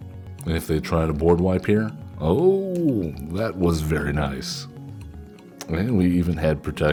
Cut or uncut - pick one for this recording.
uncut